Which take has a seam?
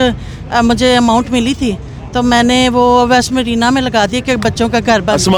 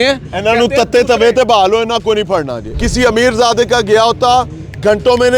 second; 1 cut; at 2.6 s

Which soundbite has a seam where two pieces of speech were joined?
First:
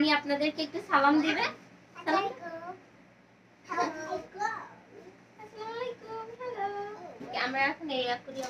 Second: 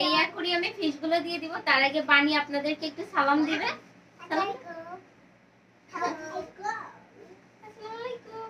first; 1 cut; at 7.3 s

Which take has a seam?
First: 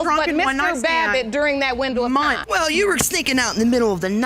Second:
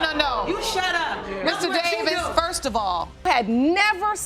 second; 1 cut; at 3.2 s

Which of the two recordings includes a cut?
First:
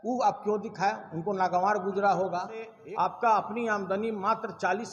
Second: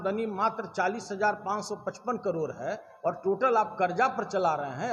first; 1 cut; at 2.7 s

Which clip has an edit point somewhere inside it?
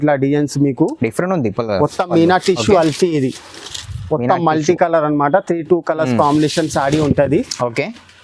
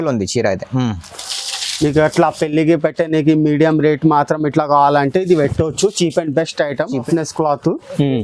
second; 1 cut; at 7.0 s

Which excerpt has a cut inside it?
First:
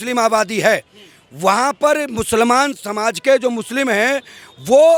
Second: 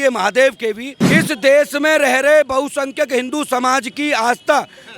second; 1 cut; at 1.1 s

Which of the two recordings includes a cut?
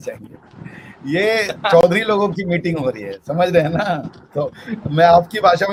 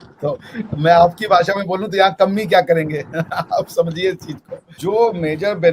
second; 1 cut; at 4.6 s

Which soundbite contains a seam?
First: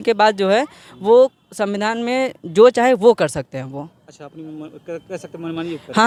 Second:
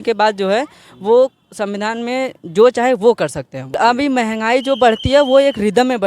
second; 1 cut; at 3.8 s

